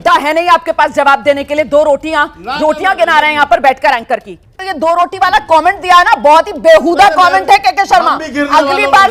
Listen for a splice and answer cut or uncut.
cut